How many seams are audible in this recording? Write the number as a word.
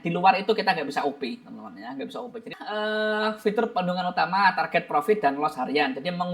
one